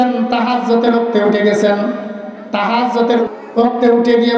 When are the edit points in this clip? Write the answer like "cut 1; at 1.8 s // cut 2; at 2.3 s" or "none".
cut 1; at 3.2 s